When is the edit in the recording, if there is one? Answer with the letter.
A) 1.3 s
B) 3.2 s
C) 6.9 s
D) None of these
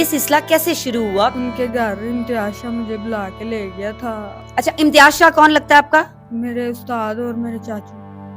A